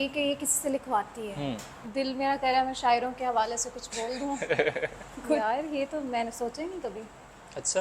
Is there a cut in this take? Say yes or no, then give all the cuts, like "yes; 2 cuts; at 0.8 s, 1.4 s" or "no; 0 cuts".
yes; 2 cuts; at 1.7 s, 5.4 s